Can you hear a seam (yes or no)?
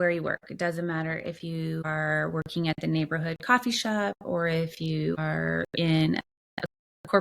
yes